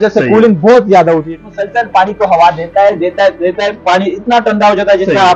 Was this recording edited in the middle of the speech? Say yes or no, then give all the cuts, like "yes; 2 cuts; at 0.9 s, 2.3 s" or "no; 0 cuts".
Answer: yes; 1 cut; at 1.3 s